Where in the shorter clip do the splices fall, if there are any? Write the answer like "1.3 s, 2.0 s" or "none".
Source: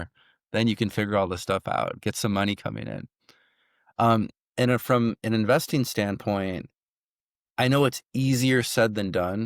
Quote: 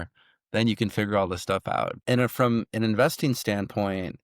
2.0 s